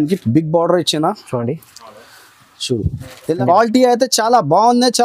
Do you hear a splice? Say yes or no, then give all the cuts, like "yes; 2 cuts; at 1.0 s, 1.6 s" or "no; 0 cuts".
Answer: yes; 1 cut; at 3.4 s